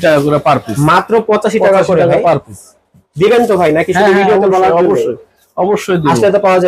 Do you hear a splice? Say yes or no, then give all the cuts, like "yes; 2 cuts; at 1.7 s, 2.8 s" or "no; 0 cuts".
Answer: no; 0 cuts